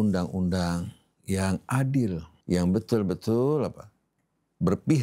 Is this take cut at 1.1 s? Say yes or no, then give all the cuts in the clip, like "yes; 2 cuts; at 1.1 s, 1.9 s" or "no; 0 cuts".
no; 1 cut; at 2.3 s